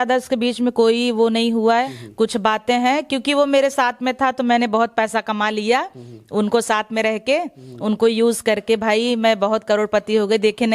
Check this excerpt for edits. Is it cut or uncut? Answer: cut